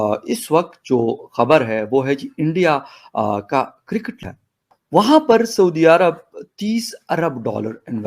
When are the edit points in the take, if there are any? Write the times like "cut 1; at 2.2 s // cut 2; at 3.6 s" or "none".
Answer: cut 1; at 4.2 s